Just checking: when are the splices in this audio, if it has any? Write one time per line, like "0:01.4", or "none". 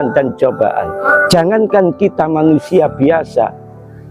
0:01.0